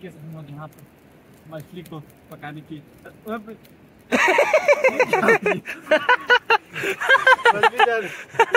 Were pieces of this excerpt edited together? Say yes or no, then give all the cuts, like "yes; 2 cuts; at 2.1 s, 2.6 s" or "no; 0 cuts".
no; 0 cuts